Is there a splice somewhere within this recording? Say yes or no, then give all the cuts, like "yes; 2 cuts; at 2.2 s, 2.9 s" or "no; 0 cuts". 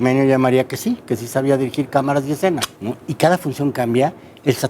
yes; 1 cut; at 2.6 s